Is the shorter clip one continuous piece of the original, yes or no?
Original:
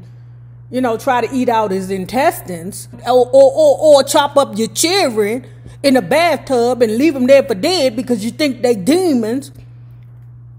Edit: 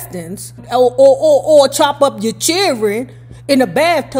yes